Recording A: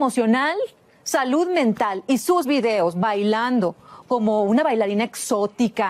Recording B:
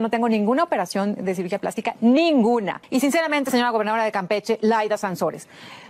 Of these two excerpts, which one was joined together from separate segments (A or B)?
B